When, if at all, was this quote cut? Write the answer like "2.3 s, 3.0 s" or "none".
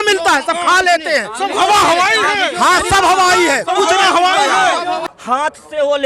5.0 s